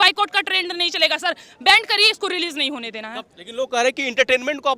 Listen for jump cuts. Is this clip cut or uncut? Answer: uncut